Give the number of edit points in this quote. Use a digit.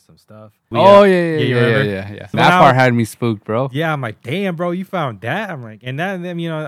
2